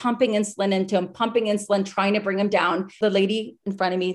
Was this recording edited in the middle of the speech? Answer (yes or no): yes